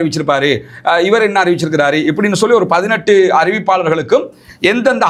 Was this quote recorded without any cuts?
yes; 0 cuts

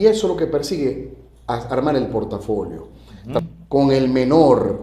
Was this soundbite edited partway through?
yes; 1 cut; at 3.4 s

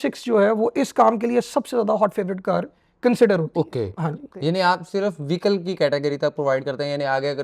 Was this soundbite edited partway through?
no; 0 cuts

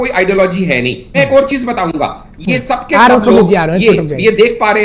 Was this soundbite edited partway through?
yes; 1 cut; at 1.0 s

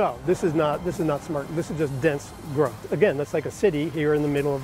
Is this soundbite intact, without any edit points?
no; 1 cut; at 2.8 s

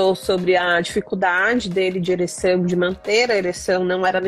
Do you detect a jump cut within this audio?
no; 0 cuts

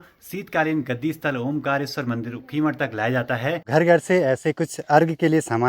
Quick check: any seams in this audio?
yes; 1 cut; at 3.7 s

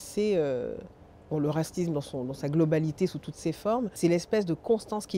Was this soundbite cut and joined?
yes; 1 cut; at 3.9 s

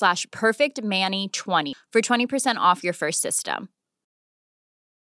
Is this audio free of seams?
no; 1 cut; at 1.7 s

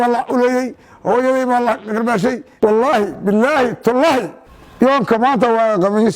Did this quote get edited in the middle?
yes; 1 cut; at 2.5 s

